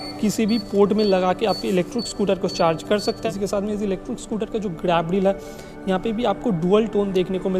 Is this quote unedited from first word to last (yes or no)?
no